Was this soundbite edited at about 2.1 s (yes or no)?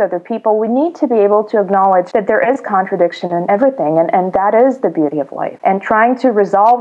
yes